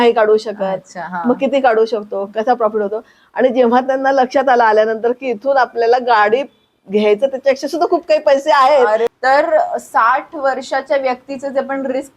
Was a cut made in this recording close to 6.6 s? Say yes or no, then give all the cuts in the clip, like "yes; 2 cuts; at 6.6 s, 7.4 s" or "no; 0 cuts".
no; 1 cut; at 9.1 s